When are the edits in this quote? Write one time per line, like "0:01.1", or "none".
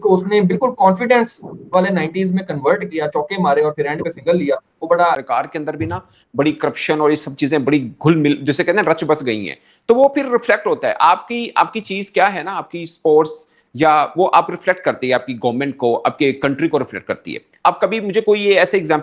0:05.2